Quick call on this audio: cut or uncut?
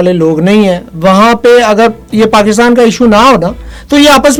uncut